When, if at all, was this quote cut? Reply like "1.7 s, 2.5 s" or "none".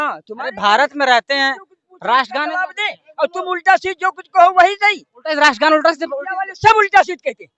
none